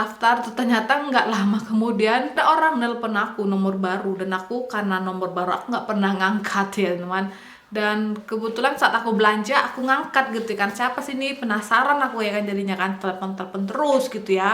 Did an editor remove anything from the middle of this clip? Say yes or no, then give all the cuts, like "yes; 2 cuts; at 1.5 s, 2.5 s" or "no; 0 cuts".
yes; 1 cut; at 2.3 s